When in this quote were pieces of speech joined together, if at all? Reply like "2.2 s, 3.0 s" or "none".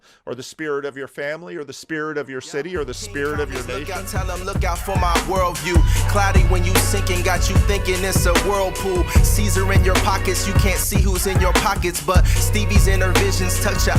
3.8 s